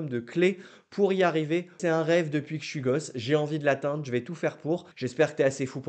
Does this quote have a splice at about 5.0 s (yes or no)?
yes